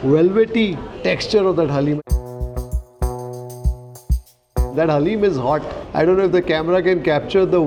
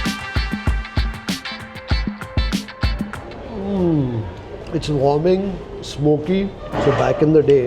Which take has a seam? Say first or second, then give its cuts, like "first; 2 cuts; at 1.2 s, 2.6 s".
second; 1 cut; at 6.6 s